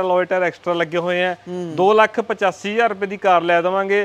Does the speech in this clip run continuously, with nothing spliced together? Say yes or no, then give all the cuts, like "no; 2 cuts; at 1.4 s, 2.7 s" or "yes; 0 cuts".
yes; 0 cuts